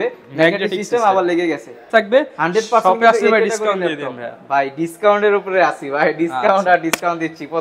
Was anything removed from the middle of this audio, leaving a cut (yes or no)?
yes